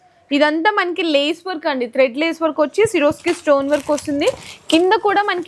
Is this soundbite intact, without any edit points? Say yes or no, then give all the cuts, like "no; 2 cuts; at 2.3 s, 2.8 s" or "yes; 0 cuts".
yes; 0 cuts